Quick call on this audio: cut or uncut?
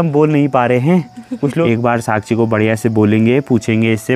cut